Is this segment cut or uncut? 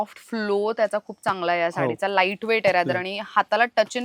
uncut